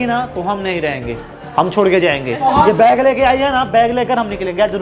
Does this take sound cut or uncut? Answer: uncut